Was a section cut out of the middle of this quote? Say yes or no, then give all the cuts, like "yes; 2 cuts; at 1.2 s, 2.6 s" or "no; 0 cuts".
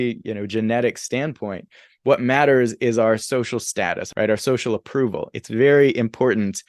yes; 1 cut; at 4.0 s